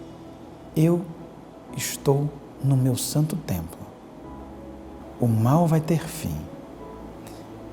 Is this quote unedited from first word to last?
no; 1 cut; at 5.0 s

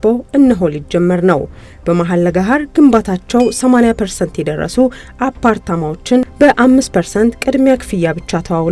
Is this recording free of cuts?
yes; 0 cuts

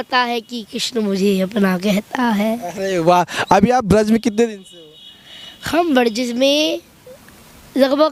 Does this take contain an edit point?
no; 0 cuts

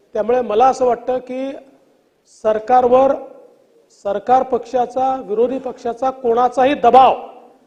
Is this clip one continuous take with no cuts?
yes; 0 cuts

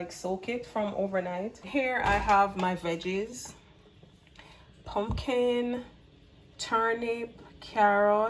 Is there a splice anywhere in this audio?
yes; 1 cut; at 1.7 s

